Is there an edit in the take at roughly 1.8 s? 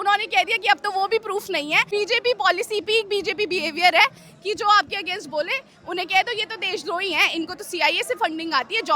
yes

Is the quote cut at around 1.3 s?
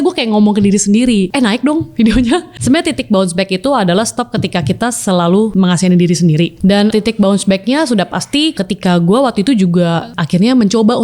yes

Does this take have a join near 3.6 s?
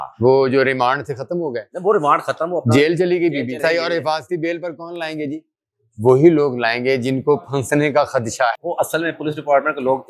yes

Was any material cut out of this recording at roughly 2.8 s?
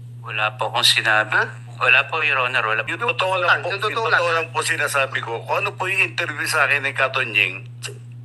yes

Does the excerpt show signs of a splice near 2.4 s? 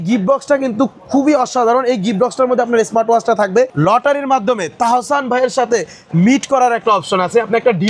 no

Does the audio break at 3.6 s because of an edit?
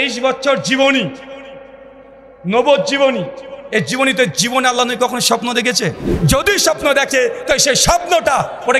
no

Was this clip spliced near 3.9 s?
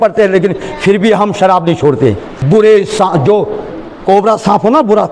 no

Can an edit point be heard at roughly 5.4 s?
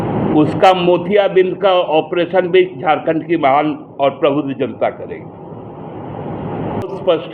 no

